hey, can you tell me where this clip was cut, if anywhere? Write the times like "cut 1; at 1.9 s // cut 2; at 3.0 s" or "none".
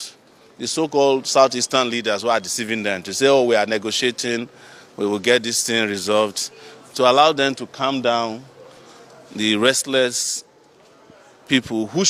none